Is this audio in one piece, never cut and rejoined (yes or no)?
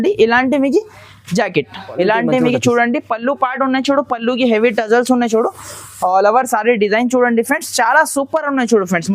no